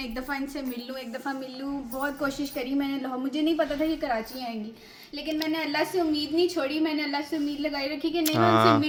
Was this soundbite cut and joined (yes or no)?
no